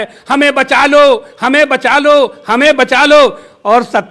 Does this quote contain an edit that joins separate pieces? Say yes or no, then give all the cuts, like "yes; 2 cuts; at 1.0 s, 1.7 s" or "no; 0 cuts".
no; 0 cuts